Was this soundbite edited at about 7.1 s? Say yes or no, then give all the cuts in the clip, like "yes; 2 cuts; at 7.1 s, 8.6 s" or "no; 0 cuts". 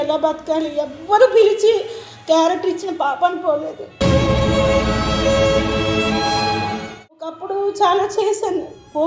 no; 0 cuts